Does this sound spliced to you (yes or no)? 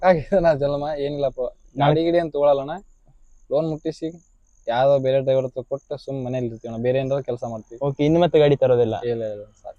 no